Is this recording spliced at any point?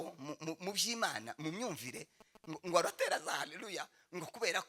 no; 0 cuts

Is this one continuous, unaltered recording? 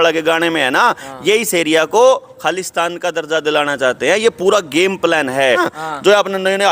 no; 1 cut; at 5.7 s

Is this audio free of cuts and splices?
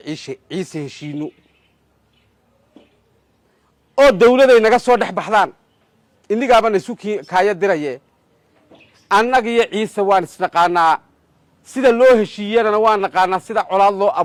yes; 0 cuts

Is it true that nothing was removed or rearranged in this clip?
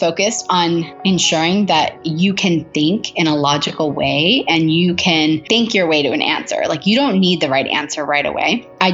no; 2 cuts; at 0.9 s, 2.0 s

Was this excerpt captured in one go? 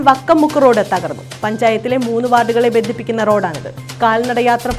yes; 0 cuts

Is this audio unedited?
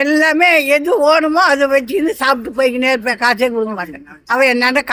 yes; 0 cuts

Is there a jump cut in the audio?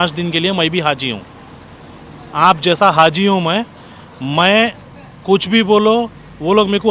no; 0 cuts

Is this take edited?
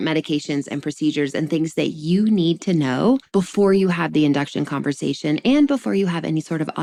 no; 0 cuts

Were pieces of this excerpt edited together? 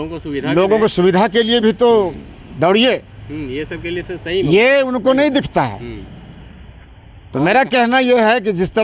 no; 0 cuts

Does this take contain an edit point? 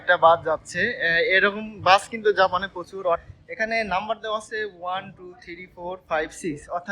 yes; 1 cut; at 3.4 s

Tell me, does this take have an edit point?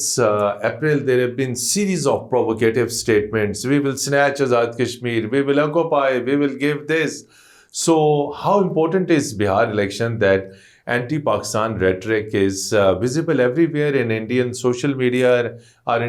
no; 0 cuts

